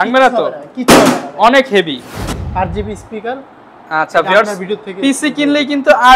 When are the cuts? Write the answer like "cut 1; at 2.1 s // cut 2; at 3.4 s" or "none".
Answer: cut 1; at 2.2 s